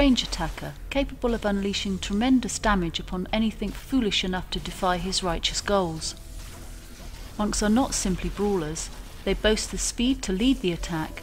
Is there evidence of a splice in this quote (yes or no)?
yes